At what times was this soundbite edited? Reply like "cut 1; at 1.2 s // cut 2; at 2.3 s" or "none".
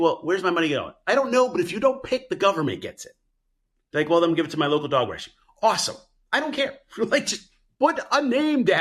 none